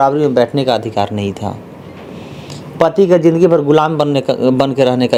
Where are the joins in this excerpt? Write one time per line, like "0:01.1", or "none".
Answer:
none